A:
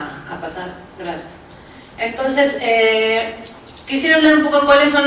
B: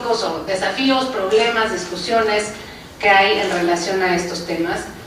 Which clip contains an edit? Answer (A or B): B